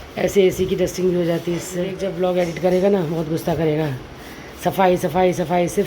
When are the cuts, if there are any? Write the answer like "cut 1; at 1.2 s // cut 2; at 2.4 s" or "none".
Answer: cut 1; at 2.0 s